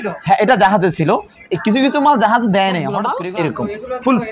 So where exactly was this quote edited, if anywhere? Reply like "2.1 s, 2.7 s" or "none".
3.2 s

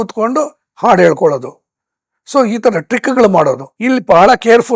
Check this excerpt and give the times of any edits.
3.7 s

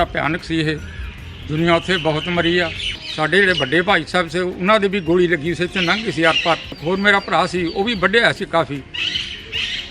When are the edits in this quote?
3.0 s

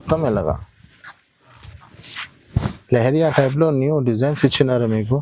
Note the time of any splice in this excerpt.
none

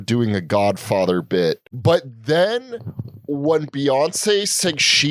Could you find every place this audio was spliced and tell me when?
1.7 s

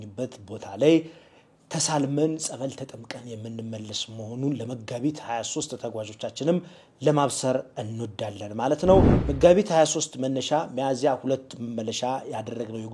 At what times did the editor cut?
9.2 s

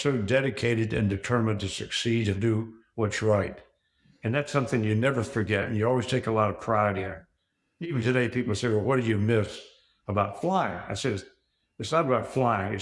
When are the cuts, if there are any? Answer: none

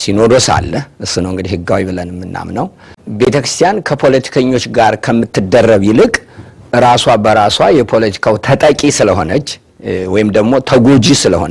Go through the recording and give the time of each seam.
3.0 s

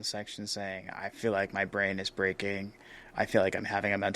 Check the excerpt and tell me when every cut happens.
3.1 s

